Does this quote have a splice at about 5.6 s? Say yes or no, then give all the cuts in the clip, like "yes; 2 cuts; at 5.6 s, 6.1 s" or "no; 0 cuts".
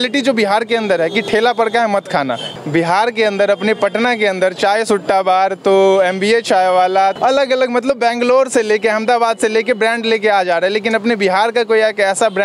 no; 2 cuts; at 2.5 s, 7.1 s